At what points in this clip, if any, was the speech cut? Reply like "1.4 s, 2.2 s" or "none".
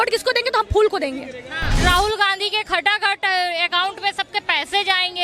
1.8 s